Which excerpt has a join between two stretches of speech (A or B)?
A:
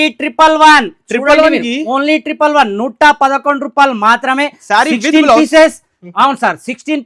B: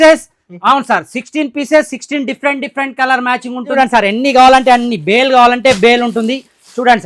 B